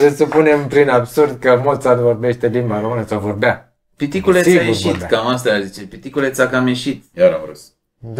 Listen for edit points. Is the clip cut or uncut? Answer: cut